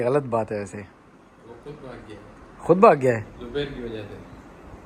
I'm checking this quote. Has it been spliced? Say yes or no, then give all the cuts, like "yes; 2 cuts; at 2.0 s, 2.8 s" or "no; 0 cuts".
no; 0 cuts